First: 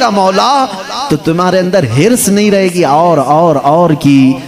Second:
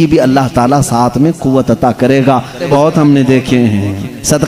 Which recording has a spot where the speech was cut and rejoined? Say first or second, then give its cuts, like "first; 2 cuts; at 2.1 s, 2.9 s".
second; 1 cut; at 2.7 s